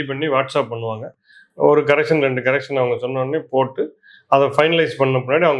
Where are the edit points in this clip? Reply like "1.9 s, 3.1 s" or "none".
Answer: none

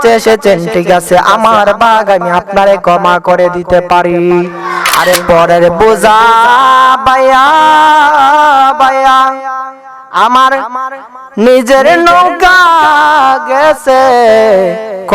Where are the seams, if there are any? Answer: 4.8 s

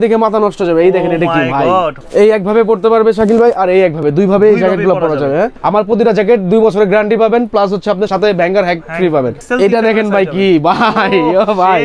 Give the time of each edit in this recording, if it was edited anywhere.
2.0 s, 5.6 s, 8.1 s, 9.4 s

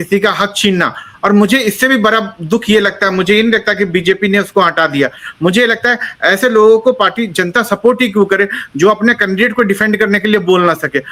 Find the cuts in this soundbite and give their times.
none

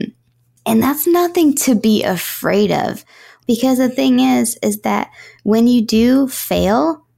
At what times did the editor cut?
3.4 s

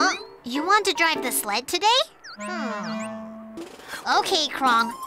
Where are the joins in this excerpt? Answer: 3.6 s

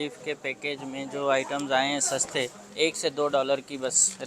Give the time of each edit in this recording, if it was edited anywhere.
2.6 s

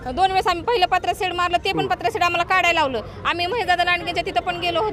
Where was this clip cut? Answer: none

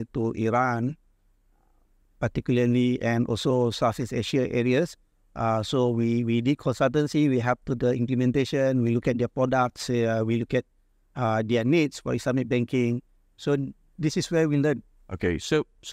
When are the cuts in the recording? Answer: none

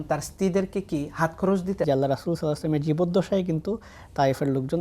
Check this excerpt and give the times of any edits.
1.9 s

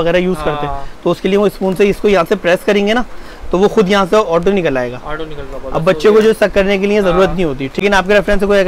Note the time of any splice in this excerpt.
7.8 s

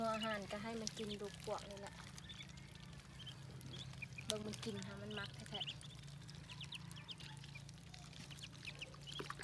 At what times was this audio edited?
none

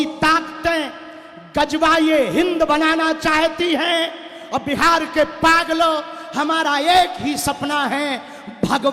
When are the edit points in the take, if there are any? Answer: none

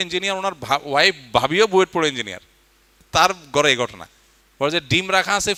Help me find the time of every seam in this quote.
none

